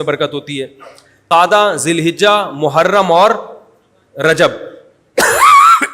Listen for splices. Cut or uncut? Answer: cut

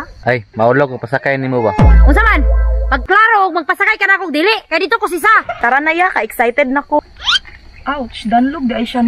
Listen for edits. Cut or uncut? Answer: cut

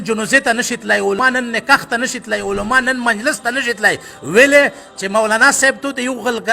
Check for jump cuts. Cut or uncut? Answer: cut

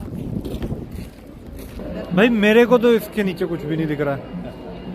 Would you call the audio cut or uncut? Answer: cut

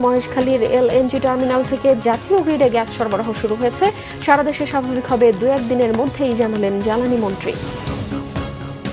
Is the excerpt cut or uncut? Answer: cut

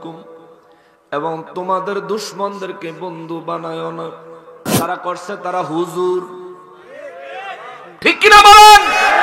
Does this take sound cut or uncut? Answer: cut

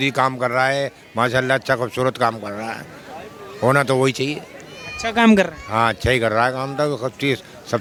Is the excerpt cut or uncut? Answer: uncut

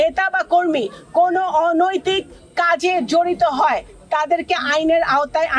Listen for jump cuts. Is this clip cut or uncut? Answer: uncut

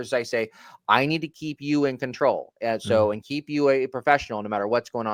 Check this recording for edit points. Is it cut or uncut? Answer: uncut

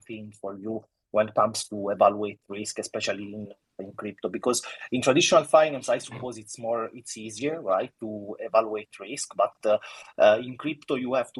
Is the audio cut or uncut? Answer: uncut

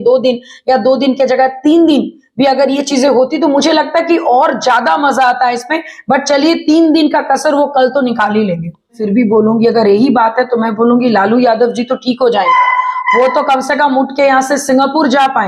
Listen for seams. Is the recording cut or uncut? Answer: cut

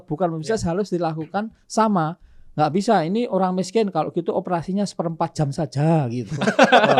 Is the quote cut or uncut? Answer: uncut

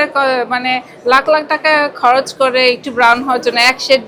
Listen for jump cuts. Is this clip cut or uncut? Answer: uncut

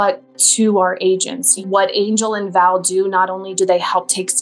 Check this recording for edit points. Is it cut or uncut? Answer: cut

